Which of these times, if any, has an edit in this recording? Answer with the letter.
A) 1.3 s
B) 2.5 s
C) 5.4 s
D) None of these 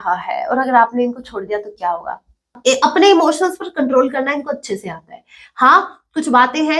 B